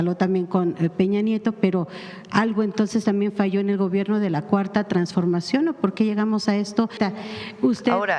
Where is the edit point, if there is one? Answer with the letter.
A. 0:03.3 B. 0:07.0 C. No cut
B